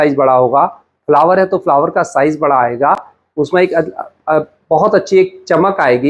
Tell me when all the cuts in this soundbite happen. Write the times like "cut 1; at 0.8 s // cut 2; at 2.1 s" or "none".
none